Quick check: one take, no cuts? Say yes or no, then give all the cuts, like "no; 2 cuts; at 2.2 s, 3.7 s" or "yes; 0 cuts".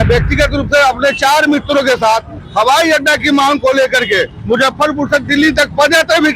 yes; 0 cuts